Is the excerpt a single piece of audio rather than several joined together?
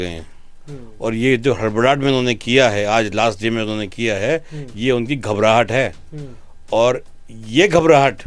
yes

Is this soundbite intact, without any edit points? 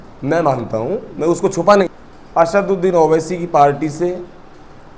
no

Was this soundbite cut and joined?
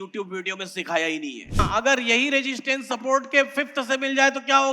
yes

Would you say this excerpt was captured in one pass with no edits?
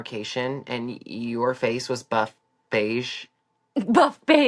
yes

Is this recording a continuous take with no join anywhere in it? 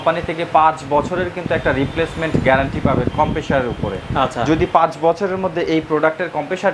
yes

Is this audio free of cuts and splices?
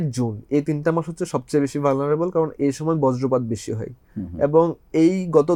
yes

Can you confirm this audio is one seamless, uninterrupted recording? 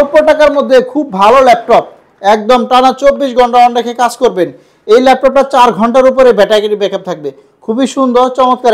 yes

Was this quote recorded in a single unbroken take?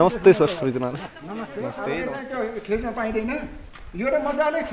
no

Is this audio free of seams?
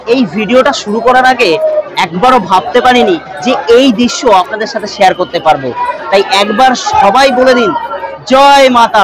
yes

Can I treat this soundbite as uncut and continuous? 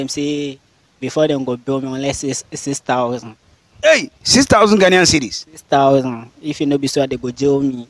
yes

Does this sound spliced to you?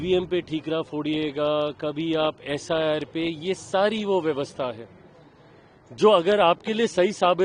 no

